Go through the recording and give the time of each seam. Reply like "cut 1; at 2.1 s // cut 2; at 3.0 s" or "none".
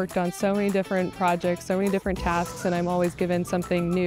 none